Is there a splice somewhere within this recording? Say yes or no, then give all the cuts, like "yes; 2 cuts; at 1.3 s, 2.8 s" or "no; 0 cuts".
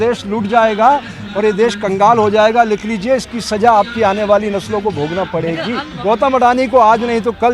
yes; 1 cut; at 5.8 s